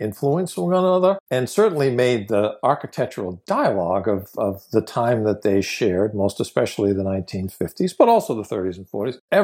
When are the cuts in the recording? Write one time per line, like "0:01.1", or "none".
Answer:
none